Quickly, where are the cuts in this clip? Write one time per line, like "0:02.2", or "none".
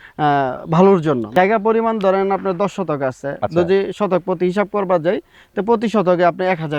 0:01.2